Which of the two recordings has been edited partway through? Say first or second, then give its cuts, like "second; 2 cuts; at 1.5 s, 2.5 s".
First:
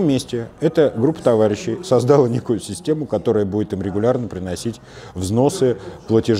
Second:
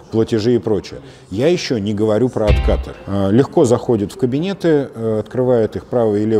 second; 1 cut; at 2.9 s